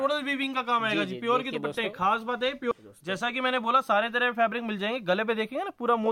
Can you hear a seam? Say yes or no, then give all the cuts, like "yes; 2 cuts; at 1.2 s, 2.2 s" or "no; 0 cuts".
yes; 1 cut; at 2.7 s